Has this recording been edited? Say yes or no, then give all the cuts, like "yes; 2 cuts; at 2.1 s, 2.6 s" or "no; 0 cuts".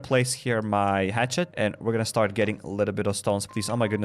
yes; 1 cut; at 1.5 s